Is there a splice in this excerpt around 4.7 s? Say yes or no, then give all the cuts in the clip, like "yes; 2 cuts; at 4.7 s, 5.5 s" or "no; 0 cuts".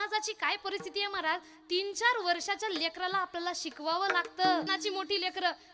yes; 1 cut; at 4.7 s